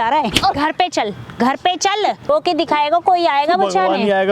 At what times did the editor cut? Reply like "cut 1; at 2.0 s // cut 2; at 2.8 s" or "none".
cut 1; at 2.3 s